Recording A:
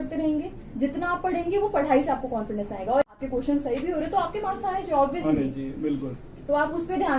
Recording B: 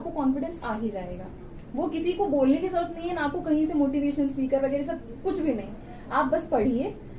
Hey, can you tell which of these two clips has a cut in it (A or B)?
A